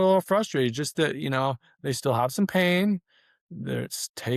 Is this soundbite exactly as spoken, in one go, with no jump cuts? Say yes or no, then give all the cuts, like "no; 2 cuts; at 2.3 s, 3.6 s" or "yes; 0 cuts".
yes; 0 cuts